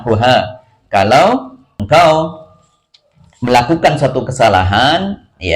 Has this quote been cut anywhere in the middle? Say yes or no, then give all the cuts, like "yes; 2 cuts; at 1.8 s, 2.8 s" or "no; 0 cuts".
yes; 1 cut; at 1.7 s